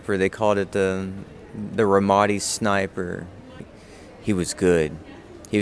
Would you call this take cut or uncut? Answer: cut